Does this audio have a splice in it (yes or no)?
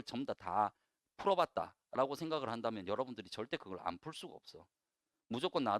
no